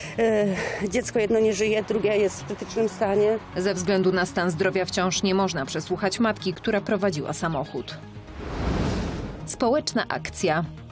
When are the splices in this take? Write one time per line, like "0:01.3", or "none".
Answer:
0:03.4